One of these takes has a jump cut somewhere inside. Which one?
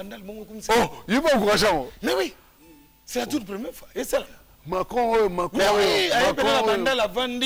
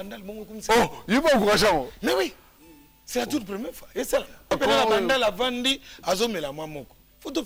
second; 1 cut; at 4.5 s

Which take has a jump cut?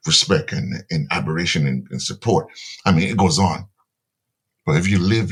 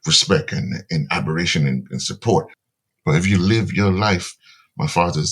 second; 1 cut; at 2.6 s

